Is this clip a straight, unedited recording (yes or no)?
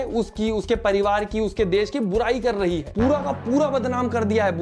yes